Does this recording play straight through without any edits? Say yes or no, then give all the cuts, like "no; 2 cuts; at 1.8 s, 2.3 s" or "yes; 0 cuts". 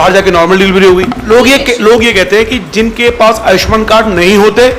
no; 1 cut; at 1.3 s